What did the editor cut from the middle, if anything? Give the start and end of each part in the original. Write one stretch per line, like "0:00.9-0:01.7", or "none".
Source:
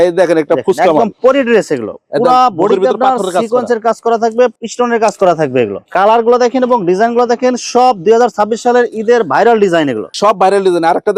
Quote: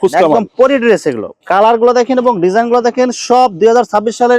0:02.0-0:05.8